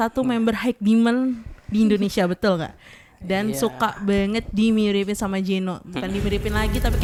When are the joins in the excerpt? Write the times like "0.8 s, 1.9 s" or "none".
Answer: none

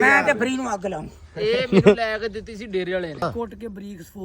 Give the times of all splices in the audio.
3.3 s

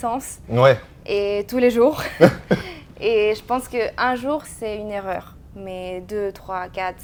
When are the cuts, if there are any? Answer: none

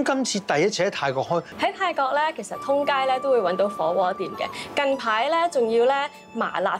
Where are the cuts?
1.5 s

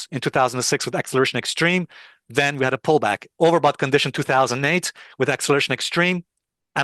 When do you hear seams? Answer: none

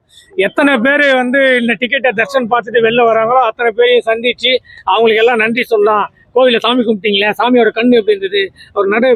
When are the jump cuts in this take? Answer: none

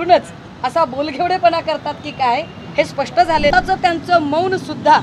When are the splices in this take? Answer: 3.5 s

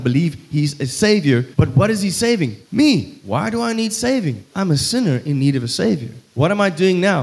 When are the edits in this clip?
1.5 s, 2.6 s, 3.2 s, 4.4 s, 6.2 s

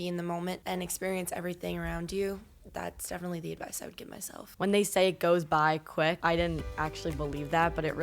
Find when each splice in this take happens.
4.5 s

